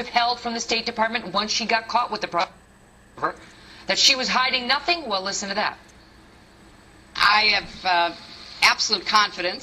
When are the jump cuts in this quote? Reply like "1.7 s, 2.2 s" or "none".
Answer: 5.1 s